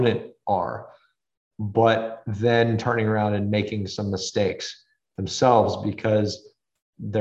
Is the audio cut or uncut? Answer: uncut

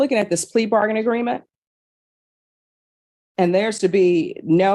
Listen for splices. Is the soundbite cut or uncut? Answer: uncut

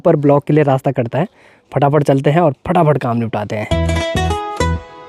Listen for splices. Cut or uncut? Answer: uncut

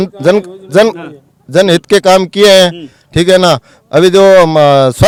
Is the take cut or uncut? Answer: uncut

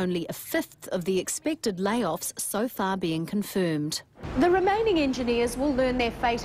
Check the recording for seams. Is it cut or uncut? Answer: cut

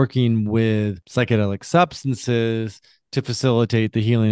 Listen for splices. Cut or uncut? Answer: cut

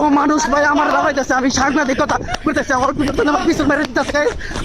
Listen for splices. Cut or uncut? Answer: uncut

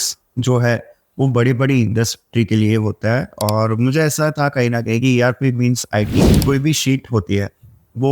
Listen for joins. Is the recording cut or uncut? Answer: cut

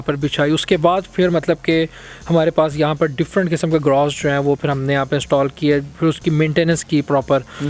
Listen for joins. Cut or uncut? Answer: uncut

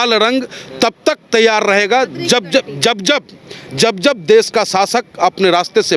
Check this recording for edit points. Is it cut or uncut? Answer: uncut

